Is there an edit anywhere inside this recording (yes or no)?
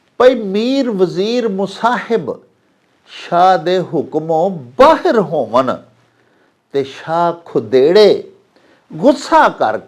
no